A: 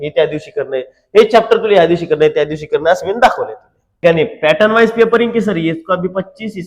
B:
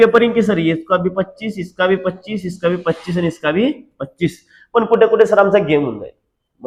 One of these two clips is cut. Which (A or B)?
A